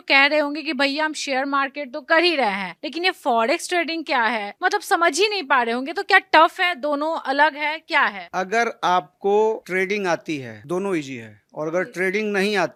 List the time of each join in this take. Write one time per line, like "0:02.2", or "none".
none